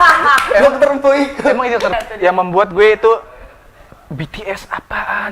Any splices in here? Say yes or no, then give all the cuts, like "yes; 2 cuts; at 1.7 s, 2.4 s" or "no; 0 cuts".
yes; 1 cut; at 1.9 s